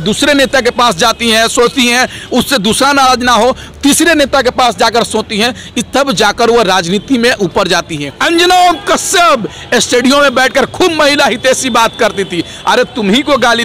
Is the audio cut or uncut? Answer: cut